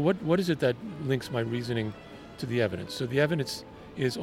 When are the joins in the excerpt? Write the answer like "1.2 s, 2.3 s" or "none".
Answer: none